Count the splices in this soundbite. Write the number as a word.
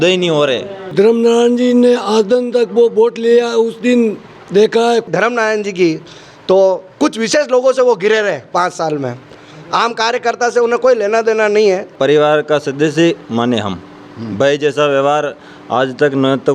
three